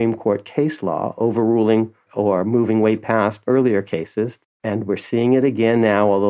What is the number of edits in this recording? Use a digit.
3